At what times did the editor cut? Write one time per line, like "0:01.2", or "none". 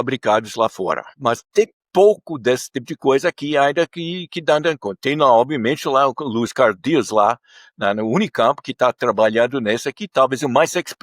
0:01.2